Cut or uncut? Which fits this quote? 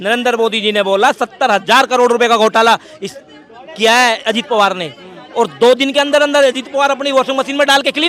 uncut